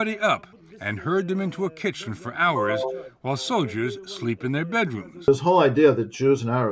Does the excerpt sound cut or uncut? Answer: cut